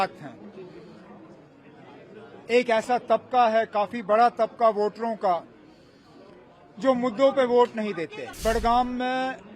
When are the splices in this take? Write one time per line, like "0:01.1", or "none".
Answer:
0:08.2